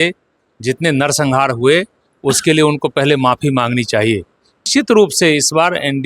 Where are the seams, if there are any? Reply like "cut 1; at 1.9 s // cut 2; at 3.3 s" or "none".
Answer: cut 1; at 4.6 s